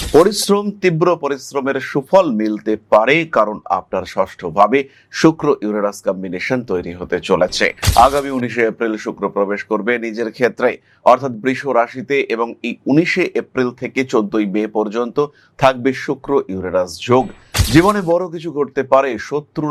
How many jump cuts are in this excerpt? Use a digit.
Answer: 0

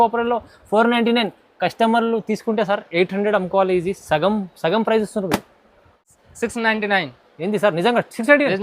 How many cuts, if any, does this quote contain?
1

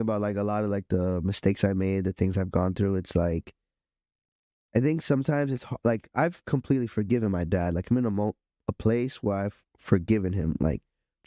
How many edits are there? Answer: 0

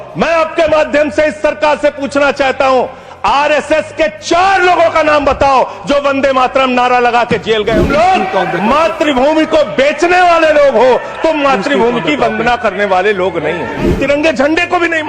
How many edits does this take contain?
2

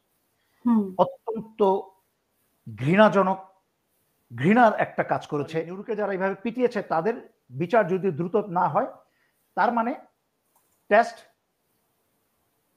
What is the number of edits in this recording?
1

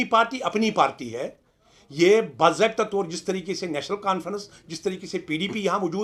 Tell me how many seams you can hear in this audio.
0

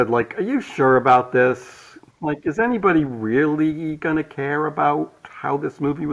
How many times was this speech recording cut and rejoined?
0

